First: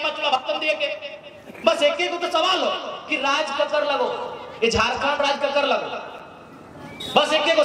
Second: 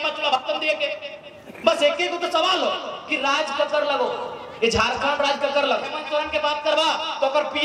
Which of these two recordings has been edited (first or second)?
second